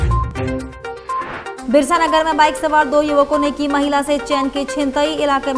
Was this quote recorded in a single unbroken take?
no; 1 cut; at 1.5 s

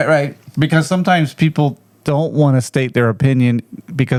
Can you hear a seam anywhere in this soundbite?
no; 0 cuts

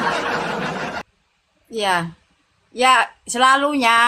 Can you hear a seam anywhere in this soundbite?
yes; 1 cut; at 1.0 s

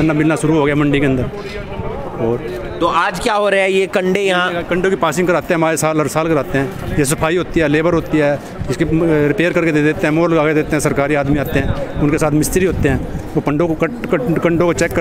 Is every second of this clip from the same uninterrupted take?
yes; 0 cuts

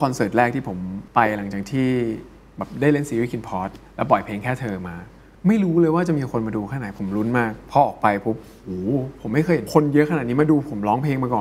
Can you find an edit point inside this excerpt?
yes; 3 cuts; at 0.9 s, 7.6 s, 9.7 s

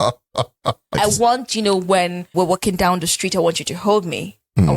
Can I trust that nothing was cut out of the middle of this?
no; 2 cuts; at 0.9 s, 2.3 s

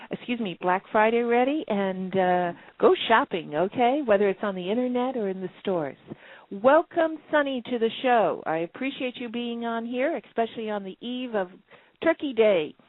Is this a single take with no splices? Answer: yes; 0 cuts

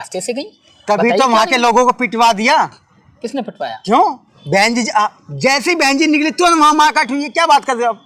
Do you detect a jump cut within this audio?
no; 0 cuts

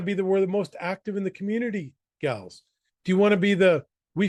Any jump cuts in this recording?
no; 0 cuts

